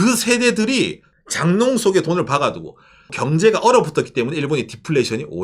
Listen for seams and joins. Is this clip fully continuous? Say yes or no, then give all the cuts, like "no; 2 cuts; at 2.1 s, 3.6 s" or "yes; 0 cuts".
no; 2 cuts; at 1.1 s, 3.2 s